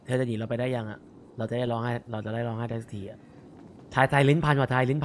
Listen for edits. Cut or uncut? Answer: uncut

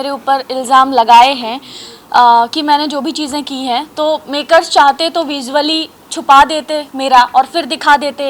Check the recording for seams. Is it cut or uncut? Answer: uncut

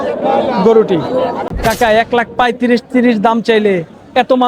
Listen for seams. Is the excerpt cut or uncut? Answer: cut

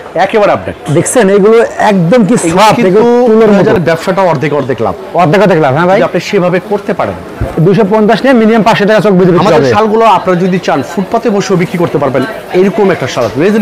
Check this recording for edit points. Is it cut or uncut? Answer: cut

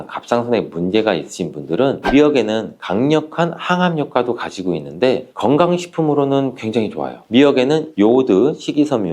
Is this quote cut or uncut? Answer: cut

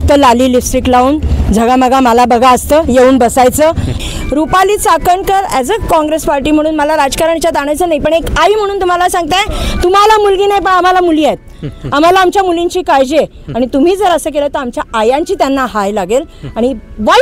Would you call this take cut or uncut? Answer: cut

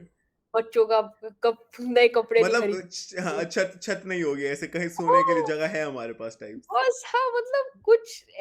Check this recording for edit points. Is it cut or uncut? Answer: uncut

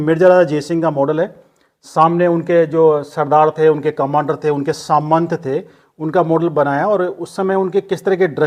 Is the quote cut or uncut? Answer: uncut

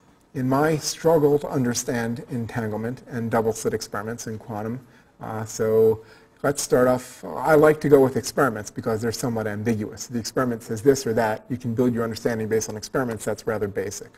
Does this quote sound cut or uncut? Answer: uncut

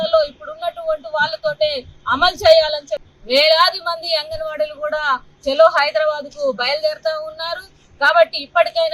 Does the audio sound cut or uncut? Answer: cut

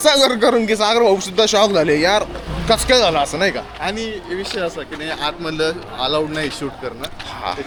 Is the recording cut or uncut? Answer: uncut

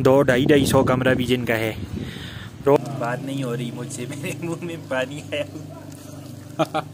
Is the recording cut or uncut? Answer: cut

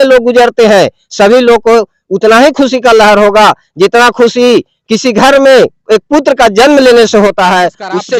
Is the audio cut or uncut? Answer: uncut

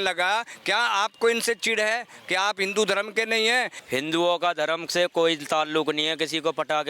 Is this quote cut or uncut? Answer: cut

